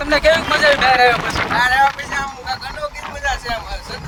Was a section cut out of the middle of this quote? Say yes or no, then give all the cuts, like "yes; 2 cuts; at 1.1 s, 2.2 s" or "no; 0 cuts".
no; 0 cuts